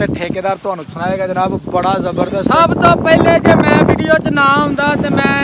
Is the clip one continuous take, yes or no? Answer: yes